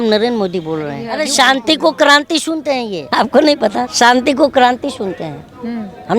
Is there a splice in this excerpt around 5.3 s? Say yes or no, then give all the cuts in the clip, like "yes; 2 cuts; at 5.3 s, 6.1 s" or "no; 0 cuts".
no; 3 cuts; at 1.1 s, 3.0 s, 3.9 s